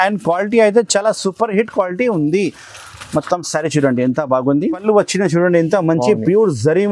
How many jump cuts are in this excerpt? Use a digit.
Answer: 1